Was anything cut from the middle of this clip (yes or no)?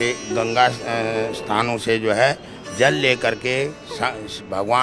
no